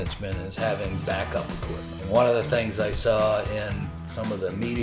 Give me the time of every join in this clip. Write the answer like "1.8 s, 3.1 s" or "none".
1.9 s